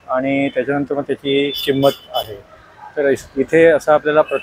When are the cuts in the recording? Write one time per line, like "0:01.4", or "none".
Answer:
none